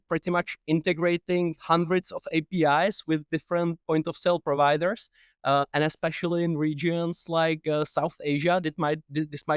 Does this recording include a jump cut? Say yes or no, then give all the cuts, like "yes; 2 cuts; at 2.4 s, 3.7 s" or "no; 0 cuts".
no; 0 cuts